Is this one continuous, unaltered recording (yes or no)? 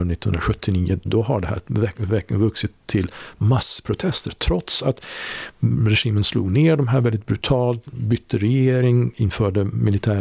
no